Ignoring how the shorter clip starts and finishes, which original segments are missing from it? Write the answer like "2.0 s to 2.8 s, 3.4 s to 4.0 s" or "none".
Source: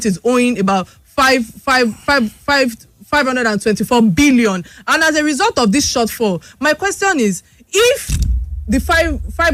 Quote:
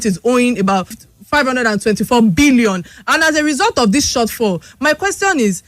1.0 s to 2.8 s